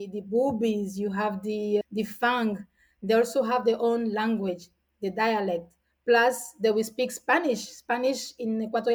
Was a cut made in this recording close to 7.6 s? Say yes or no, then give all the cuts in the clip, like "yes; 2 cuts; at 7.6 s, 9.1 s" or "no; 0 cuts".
no; 0 cuts